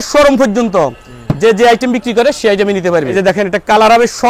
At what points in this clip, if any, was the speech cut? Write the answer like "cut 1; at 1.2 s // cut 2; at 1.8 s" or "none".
cut 1; at 3.1 s